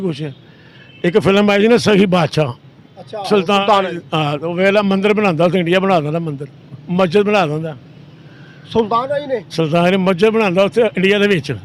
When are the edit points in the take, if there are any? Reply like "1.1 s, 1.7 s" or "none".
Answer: none